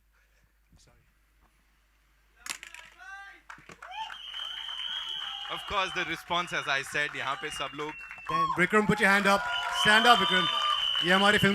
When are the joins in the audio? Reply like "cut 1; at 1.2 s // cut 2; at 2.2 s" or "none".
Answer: cut 1; at 8.3 s